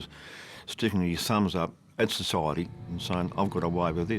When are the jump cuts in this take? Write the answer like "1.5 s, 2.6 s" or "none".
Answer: 2.7 s